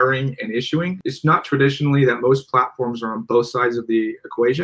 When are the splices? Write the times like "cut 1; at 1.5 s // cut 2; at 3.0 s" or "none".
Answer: cut 1; at 1.0 s